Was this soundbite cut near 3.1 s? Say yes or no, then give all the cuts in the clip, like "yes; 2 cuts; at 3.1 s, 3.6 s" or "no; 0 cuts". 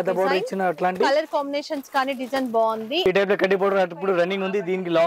yes; 1 cut; at 3.1 s